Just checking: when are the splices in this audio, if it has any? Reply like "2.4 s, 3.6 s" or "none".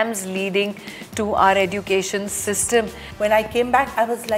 3.1 s